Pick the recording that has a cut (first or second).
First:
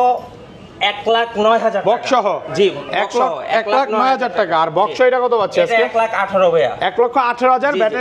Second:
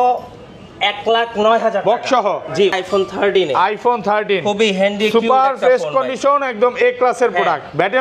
second